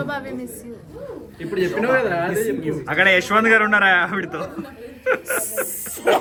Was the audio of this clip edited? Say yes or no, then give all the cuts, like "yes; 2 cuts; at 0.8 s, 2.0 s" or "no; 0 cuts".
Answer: no; 0 cuts